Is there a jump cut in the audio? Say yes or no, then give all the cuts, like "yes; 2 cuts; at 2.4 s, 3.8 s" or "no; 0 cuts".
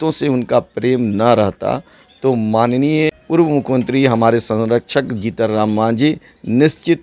no; 0 cuts